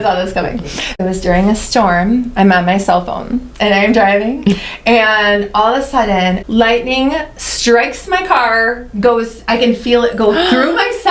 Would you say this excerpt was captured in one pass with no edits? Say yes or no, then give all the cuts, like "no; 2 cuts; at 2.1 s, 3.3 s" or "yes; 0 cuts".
no; 2 cuts; at 0.9 s, 6.4 s